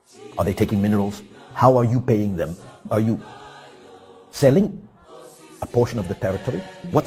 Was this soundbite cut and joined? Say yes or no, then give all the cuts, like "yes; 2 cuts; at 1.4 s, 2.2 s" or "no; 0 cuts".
no; 0 cuts